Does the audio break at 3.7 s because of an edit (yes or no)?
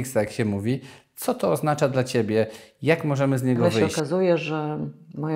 yes